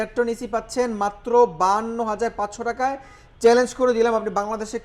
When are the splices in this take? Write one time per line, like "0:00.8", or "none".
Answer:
none